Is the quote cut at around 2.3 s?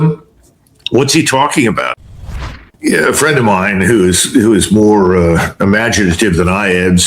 yes; 1 cut; at 2.3 s

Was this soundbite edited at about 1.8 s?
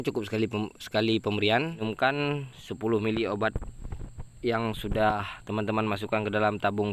yes; 1 cut; at 1.8 s

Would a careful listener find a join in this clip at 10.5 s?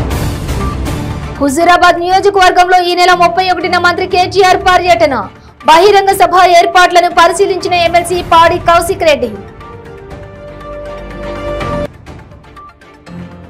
no; 1 cut; at 1.2 s

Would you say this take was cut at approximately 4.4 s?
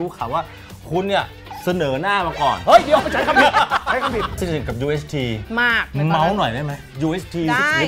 yes; 1 cut; at 4.4 s

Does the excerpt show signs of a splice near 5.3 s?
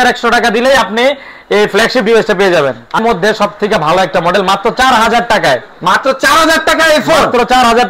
no; 1 cut; at 3.0 s

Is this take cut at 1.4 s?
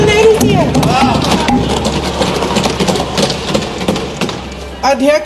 no; 0 cuts

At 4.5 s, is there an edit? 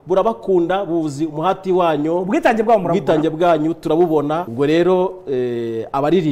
yes; 1 cut; at 4.5 s

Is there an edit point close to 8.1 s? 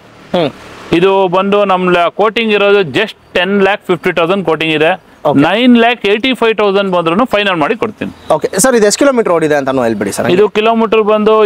no; 0 cuts

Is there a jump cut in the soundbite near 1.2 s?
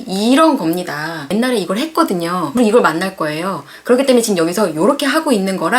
yes; 2 cuts; at 1.2 s, 2.5 s

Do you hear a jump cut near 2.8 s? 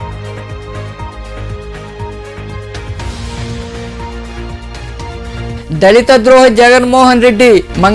yes; 1 cut; at 2.8 s

